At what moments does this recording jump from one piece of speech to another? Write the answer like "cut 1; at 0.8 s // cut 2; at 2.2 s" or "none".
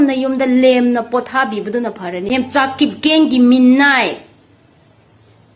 cut 1; at 2.3 s